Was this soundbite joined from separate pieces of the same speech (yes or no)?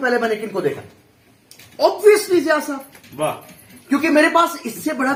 no